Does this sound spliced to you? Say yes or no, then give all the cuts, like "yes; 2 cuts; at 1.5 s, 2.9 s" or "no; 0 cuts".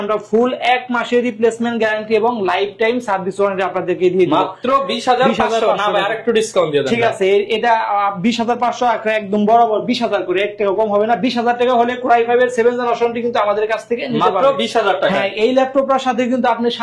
no; 0 cuts